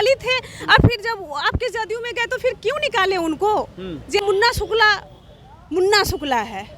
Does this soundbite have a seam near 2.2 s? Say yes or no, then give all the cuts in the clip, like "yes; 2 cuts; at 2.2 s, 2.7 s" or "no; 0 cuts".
no; 1 cut; at 4.2 s